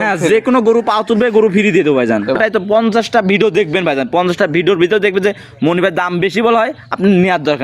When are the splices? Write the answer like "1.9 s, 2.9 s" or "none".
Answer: 2.4 s